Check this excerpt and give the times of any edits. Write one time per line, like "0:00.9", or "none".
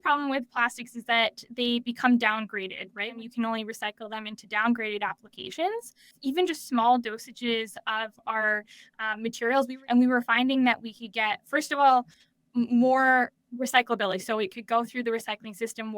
0:03.2
0:06.1
0:09.7

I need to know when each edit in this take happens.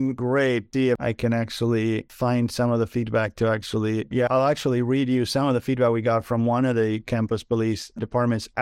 0:01.0
0:02.1

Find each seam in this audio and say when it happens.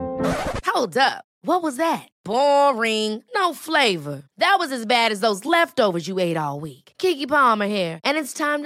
none

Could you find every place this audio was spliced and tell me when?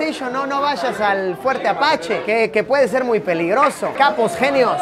0:03.9

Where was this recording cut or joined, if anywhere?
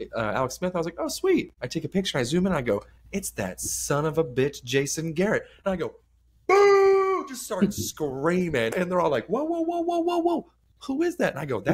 0:08.7

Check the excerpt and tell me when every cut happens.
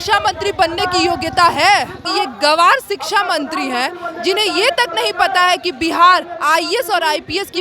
0:02.0

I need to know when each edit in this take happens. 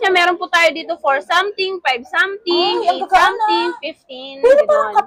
none

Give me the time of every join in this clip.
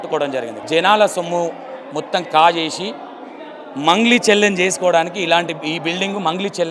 none

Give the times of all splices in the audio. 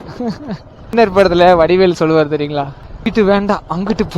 0:00.9
0:03.1

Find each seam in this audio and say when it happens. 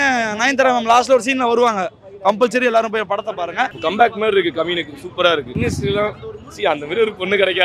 0:03.7
0:05.5

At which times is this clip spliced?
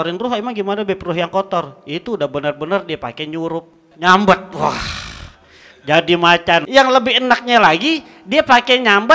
0:03.8
0:06.6

